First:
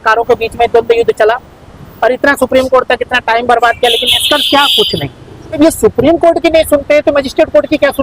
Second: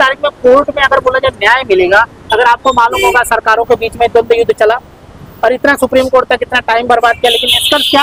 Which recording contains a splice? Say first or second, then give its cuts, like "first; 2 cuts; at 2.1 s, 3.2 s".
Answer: first; 1 cut; at 5.6 s